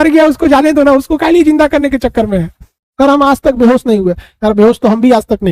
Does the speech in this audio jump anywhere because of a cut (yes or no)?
yes